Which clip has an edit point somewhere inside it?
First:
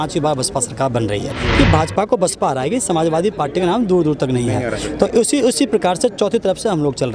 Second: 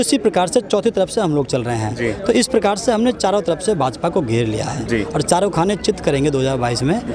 first; 1 cut; at 1.3 s

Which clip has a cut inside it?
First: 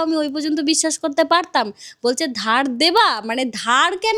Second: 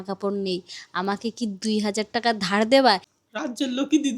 second; 1 cut; at 3.1 s

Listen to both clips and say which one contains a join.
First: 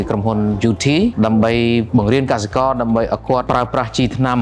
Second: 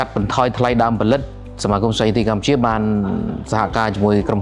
first; 3 cuts; at 1.1 s, 1.9 s, 3.4 s

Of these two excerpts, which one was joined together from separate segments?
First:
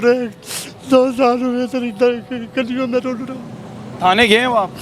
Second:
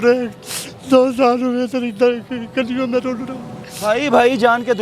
second; 1 cut; at 3.7 s

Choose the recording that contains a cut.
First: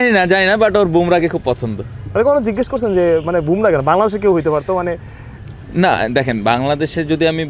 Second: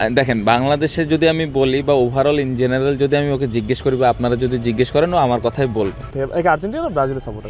second; 1 cut; at 6.1 s

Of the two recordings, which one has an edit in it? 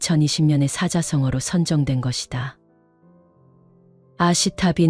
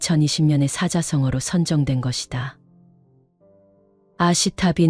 first; 2 cuts; at 2.7 s, 4.0 s

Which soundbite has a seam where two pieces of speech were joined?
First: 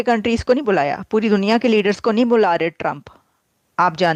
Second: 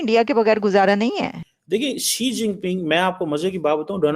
second; 1 cut; at 1.5 s

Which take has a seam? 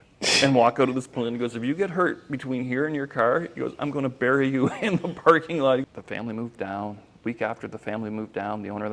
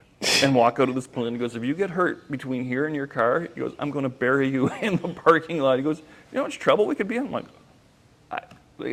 first; 1 cut; at 5.8 s

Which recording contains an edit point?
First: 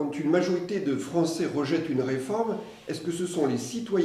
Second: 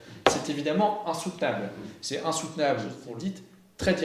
second; 1 cut; at 3.0 s

